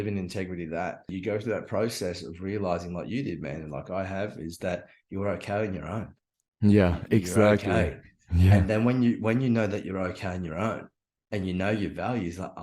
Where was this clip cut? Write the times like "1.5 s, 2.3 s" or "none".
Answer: 1.1 s